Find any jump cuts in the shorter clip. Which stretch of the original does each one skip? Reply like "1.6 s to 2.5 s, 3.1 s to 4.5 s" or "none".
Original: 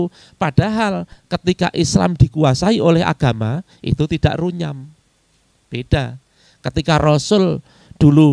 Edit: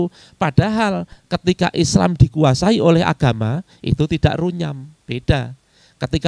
4.9 s to 5.5 s

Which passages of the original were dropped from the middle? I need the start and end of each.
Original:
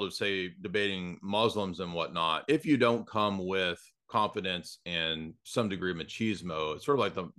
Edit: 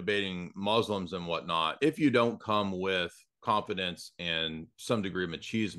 none

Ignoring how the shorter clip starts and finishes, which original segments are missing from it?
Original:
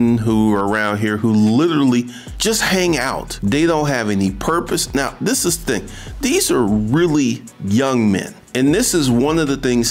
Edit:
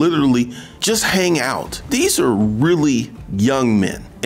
3.3 s to 6.0 s

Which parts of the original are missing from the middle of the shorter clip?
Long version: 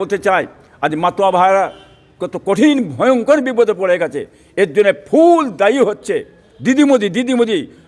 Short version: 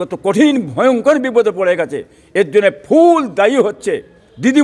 none

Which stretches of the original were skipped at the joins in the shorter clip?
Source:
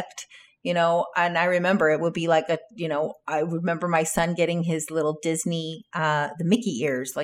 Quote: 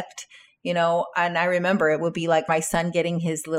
2.4 s to 3.9 s

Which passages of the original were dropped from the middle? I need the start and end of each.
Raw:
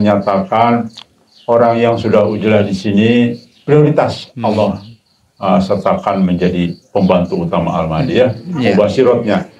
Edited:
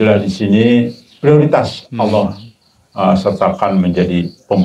none

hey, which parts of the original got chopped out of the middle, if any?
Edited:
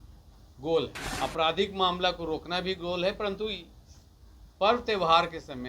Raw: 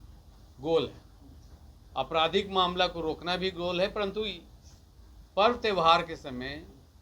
1.0 s to 1.8 s

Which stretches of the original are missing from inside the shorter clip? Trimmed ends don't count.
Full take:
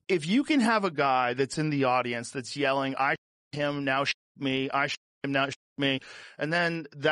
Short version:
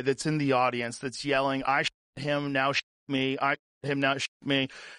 none

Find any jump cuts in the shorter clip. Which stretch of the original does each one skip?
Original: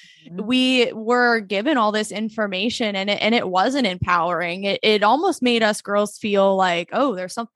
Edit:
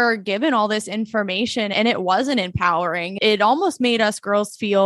3.0 s to 3.2 s, 4.6 s to 4.8 s

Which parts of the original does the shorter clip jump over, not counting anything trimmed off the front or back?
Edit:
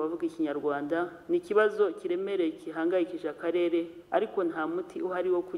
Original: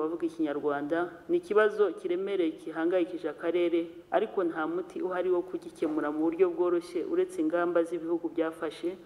none

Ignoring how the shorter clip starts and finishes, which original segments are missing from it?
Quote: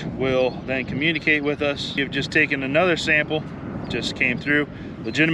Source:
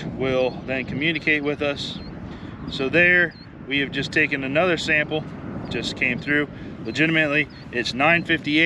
2.0 s to 3.8 s

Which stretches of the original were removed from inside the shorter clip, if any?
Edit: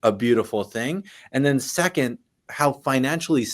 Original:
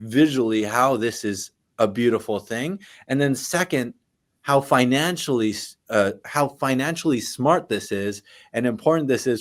4.2 s to 6.2 s

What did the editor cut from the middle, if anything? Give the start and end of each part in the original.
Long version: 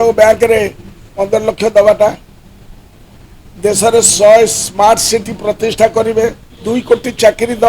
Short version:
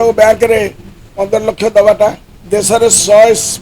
2.3 s to 3.4 s

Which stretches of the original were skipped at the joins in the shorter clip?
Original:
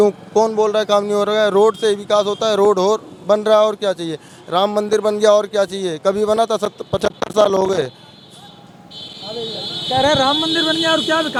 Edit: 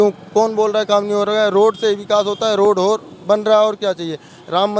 none

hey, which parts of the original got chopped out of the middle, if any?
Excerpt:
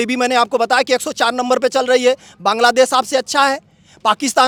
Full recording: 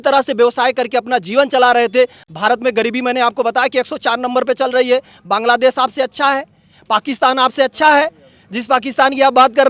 none

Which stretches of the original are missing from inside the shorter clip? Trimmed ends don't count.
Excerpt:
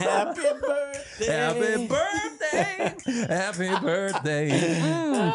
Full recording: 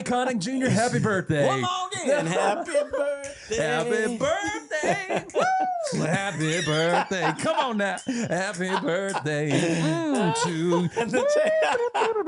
5.3 s to 8.0 s

